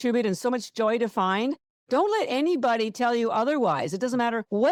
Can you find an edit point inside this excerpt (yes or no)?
no